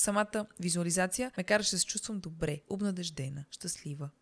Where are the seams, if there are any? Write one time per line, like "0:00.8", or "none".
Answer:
0:01.3